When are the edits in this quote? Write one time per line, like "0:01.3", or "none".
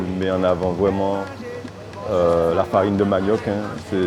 none